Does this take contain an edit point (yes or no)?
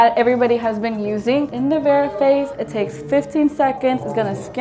yes